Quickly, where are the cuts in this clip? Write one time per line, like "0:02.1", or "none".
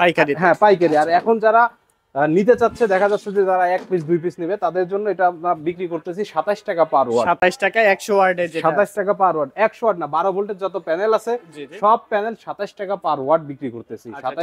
none